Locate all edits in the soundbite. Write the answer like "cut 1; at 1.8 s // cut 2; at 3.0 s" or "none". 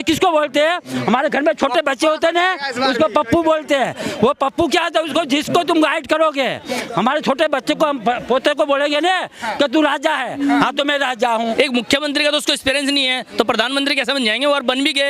cut 1; at 11.5 s

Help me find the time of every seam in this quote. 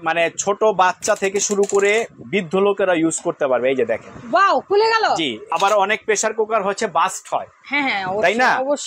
cut 1; at 5.4 s

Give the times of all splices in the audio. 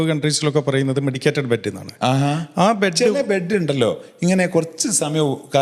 none

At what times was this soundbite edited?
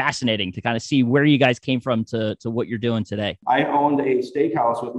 cut 1; at 3.4 s

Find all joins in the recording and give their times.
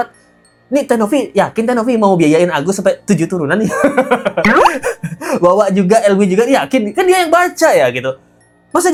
none

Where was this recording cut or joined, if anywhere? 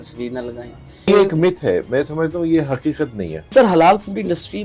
cut 1; at 1.1 s // cut 2; at 3.5 s

